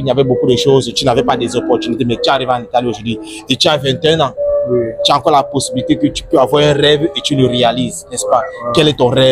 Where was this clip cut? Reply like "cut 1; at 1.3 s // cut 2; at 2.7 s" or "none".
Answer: none